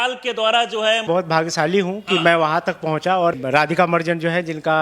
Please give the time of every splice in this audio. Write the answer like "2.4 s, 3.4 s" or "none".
1.1 s, 3.4 s